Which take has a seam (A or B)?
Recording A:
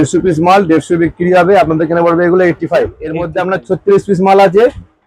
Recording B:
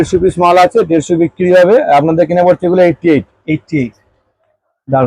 A